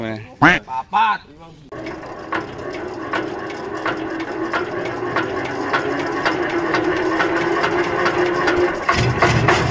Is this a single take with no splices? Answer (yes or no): no